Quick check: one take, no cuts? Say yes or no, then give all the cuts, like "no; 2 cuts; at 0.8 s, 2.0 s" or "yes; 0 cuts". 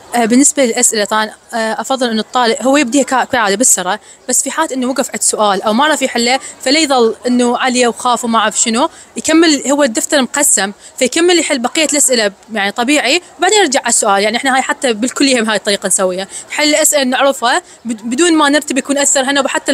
yes; 0 cuts